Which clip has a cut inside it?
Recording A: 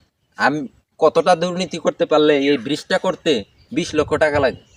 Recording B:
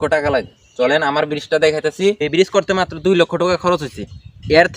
B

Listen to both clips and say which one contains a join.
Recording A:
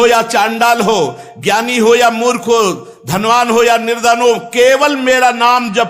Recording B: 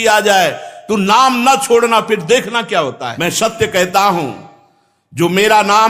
B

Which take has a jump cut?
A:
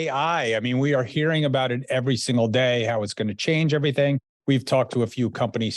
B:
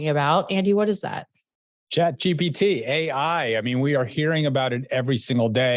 A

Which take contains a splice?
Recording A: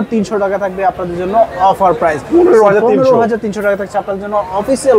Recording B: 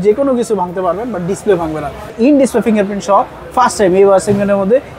B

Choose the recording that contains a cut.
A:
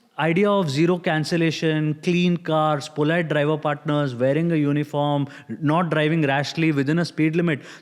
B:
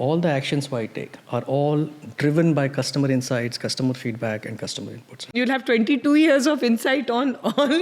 B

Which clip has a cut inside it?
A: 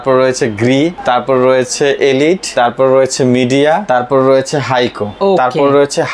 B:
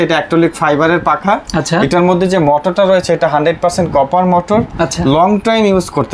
A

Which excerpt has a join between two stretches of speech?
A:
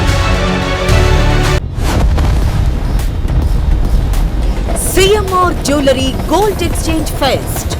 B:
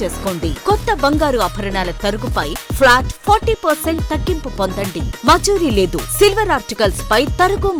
A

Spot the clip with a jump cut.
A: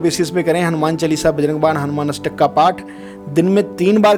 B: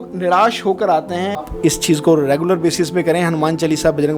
B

